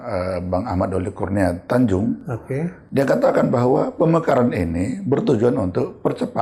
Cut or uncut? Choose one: uncut